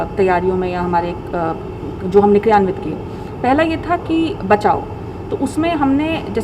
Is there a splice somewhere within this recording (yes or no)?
no